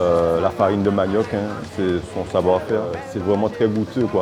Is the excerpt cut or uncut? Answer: cut